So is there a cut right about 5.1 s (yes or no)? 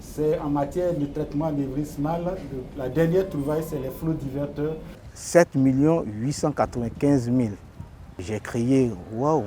yes